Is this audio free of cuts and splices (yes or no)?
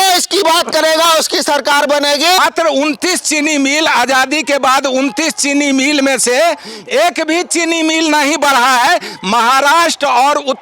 no